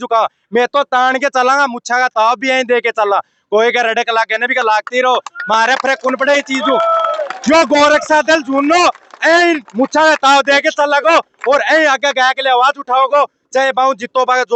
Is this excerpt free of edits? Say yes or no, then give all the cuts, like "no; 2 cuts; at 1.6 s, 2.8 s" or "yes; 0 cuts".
yes; 0 cuts